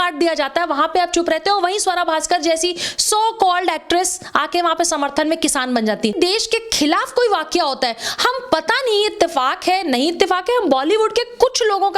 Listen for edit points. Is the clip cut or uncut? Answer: cut